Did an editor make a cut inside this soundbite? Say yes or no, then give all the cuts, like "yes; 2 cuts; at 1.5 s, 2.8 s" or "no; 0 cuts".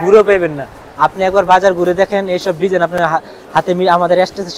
no; 0 cuts